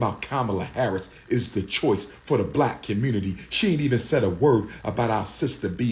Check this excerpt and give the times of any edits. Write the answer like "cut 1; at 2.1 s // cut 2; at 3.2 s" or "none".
none